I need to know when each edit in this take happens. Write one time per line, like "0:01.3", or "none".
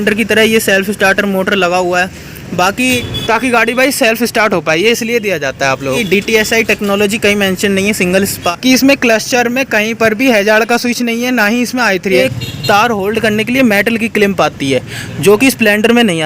0:03.0
0:06.0
0:08.4
0:12.2